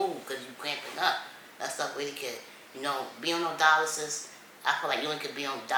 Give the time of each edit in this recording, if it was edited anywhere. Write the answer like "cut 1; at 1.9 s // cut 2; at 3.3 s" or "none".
none